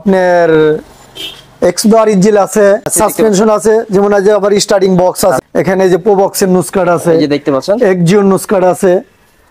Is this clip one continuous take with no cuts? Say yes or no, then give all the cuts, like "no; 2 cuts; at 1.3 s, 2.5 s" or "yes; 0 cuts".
no; 2 cuts; at 2.9 s, 5.4 s